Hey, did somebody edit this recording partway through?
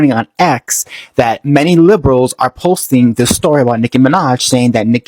no; 0 cuts

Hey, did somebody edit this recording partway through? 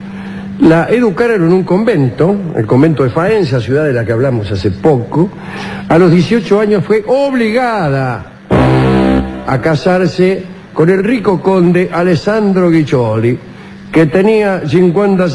no; 0 cuts

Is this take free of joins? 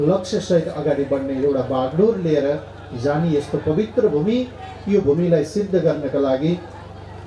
yes; 0 cuts

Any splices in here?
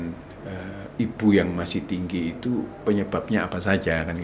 no; 0 cuts

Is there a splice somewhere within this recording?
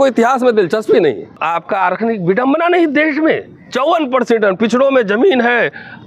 yes; 1 cut; at 1.4 s

